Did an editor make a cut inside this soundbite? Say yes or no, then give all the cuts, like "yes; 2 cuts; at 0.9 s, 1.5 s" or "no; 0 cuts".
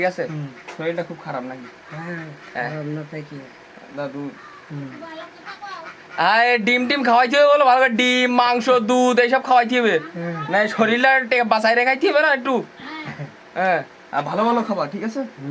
no; 0 cuts